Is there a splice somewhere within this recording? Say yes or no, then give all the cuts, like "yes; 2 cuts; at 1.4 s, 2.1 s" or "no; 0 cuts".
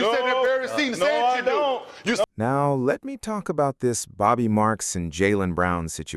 yes; 1 cut; at 2.3 s